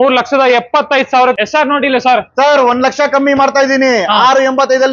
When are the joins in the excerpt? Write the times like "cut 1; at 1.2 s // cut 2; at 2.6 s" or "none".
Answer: cut 1; at 1.4 s